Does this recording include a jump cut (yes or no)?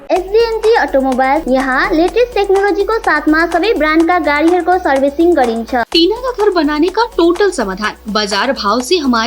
yes